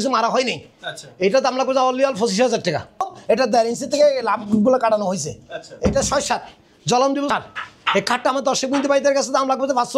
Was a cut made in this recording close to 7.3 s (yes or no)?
yes